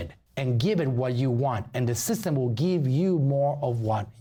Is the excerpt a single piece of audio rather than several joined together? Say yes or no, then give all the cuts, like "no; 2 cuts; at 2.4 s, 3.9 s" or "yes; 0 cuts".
yes; 0 cuts